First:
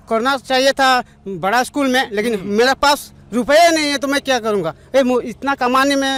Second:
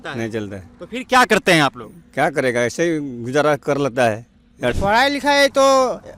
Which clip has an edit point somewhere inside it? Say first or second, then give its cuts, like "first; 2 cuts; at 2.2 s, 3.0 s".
second; 1 cut; at 4.7 s